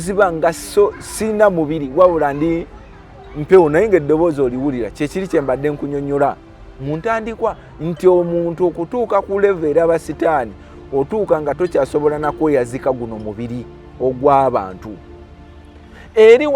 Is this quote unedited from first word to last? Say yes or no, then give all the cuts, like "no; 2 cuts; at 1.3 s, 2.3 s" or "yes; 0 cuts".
yes; 0 cuts